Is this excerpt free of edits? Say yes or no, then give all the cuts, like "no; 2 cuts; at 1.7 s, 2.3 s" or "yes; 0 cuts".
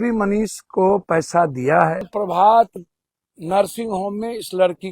no; 1 cut; at 2.1 s